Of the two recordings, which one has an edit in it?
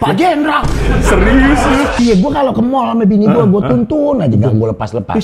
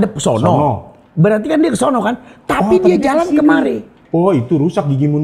first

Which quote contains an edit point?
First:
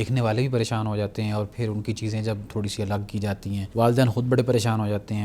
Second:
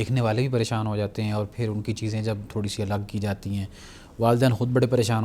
first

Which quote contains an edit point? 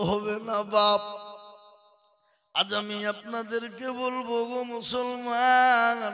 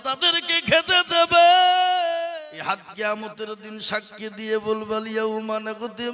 second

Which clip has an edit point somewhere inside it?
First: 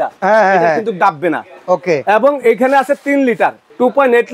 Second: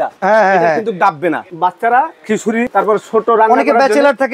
second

